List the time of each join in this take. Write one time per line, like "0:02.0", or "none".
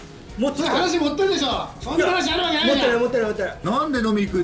0:03.6